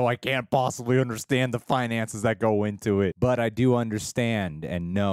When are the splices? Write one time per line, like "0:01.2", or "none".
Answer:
0:03.2